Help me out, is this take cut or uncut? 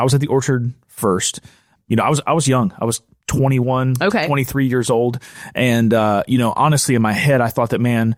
uncut